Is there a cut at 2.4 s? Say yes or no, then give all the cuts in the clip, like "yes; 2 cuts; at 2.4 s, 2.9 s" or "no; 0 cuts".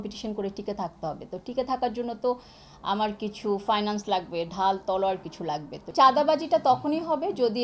no; 1 cut; at 5.9 s